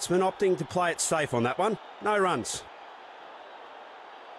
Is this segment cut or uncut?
cut